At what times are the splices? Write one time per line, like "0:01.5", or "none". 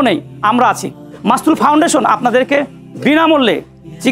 0:01.1